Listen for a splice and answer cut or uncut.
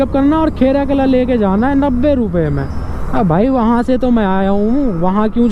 uncut